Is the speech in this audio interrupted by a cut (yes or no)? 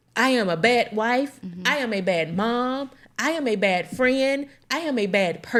no